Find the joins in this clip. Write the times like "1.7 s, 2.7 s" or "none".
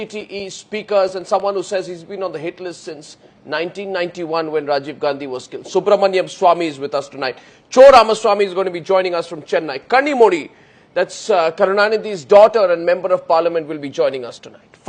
9.4 s